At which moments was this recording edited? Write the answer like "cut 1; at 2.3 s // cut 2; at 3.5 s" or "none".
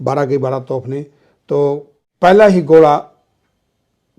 cut 1; at 2.0 s